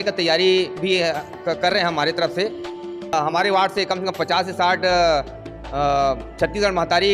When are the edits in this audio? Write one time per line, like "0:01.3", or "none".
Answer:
0:03.1